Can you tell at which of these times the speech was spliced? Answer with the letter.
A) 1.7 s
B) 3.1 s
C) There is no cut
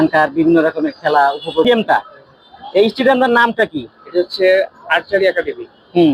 A